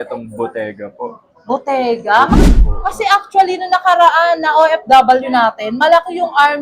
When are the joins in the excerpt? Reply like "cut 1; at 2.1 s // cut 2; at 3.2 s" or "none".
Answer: cut 1; at 2.5 s